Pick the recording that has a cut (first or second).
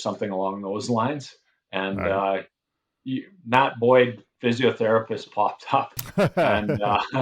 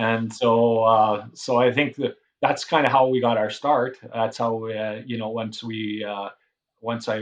first